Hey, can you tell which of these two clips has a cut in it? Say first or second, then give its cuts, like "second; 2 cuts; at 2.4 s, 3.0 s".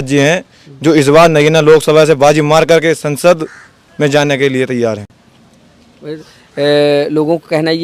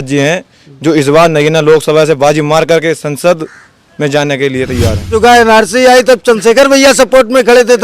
second; 1 cut; at 5.1 s